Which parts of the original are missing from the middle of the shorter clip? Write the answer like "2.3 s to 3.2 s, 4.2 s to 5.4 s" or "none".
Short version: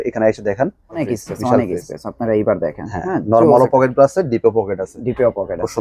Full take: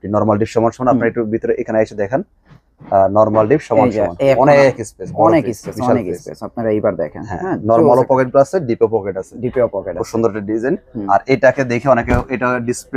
2.7 s to 5.6 s